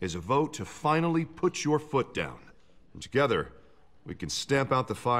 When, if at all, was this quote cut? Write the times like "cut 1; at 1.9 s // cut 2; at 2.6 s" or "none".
none